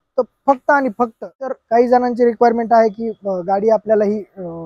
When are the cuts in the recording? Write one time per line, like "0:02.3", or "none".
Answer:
0:01.5